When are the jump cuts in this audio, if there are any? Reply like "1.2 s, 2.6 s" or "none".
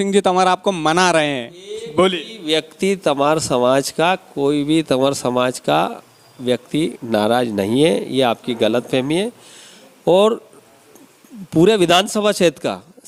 none